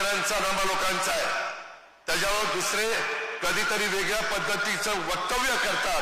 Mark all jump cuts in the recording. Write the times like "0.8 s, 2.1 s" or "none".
none

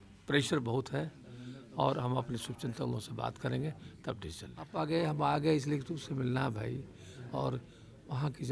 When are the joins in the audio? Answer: 4.7 s

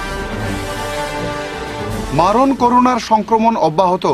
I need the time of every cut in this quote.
none

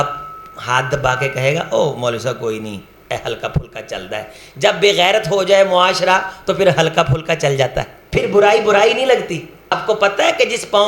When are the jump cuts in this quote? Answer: 8.0 s, 9.7 s

